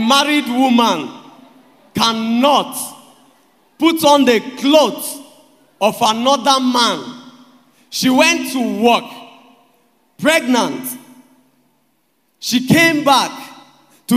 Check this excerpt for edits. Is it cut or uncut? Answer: uncut